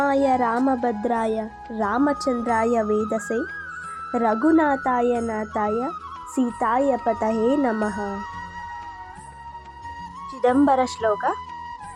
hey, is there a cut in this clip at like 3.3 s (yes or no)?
no